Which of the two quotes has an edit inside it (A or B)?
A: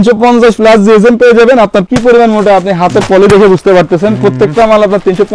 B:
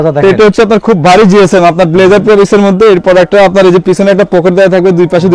A